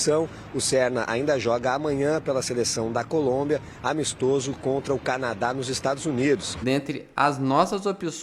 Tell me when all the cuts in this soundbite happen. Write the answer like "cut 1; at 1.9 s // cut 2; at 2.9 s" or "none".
cut 1; at 6.5 s